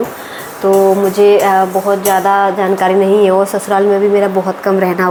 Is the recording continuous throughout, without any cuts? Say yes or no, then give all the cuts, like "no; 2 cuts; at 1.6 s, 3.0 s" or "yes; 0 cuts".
yes; 0 cuts